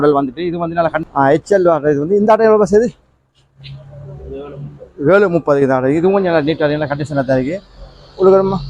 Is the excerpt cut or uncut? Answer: cut